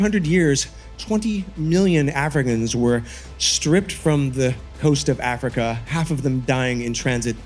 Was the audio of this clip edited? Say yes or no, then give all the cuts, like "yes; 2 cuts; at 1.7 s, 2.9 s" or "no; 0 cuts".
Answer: no; 0 cuts